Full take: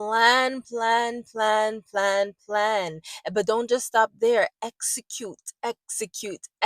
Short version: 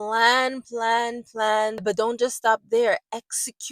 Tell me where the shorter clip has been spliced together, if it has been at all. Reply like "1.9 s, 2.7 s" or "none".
1.8 s